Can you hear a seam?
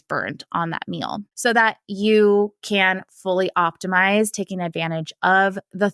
yes; 1 cut; at 1.3 s

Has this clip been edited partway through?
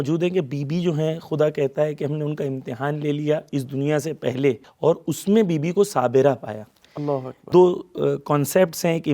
yes; 2 cuts; at 4.7 s, 7.4 s

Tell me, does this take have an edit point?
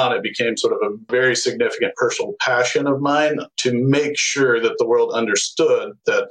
yes; 1 cut; at 1.1 s

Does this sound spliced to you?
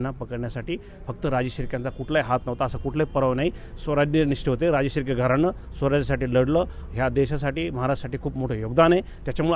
no; 0 cuts

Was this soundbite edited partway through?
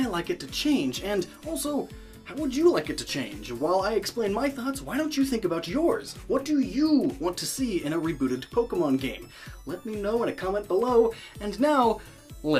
yes; 1 cut; at 7.5 s

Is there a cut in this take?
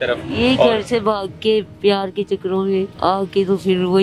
yes; 1 cut; at 2.9 s

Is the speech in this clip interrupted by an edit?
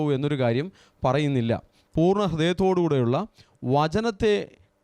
yes; 1 cut; at 1.8 s

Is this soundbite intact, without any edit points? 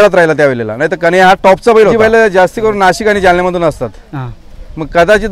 no; 1 cut; at 1.9 s

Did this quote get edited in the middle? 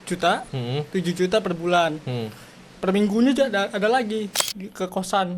yes; 1 cut; at 4.4 s

